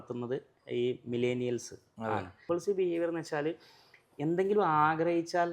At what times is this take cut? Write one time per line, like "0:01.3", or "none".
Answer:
0:02.3